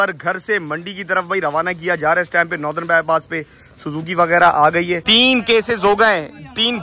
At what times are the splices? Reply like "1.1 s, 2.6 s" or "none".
5.0 s